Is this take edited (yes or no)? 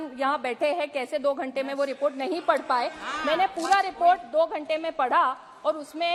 no